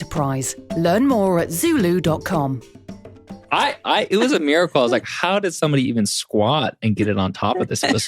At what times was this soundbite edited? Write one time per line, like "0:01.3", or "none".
0:03.4